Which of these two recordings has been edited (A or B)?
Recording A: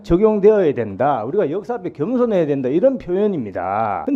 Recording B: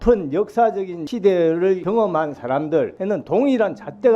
B